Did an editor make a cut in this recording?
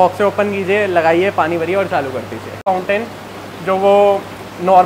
yes; 1 cut; at 2.7 s

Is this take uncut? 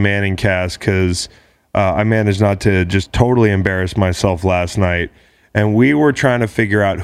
yes; 0 cuts

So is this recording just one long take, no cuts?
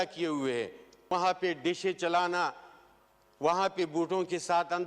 no; 1 cut; at 1.1 s

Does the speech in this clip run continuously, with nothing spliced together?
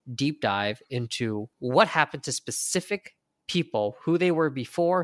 no; 1 cut; at 1.5 s

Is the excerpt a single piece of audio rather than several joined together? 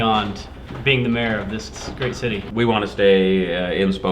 no; 1 cut; at 2.4 s

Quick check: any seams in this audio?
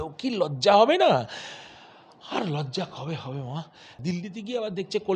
yes; 1 cut; at 4.0 s

